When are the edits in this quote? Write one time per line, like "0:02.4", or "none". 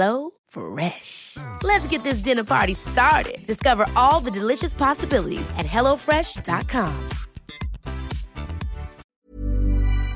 0:09.2